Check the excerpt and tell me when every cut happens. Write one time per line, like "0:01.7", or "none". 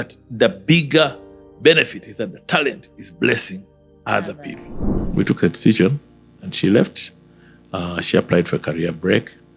0:05.0